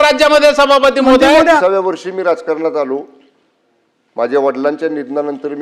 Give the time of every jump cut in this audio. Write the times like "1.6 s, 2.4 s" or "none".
1.6 s